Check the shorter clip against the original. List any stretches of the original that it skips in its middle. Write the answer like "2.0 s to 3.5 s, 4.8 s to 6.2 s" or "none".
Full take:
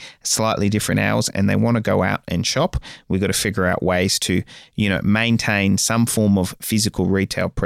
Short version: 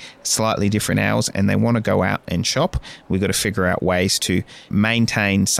4.7 s to 5.0 s